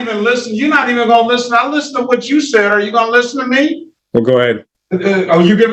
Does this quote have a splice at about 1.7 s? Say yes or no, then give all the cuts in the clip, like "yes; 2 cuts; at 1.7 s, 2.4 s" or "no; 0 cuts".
no; 2 cuts; at 3.9 s, 4.7 s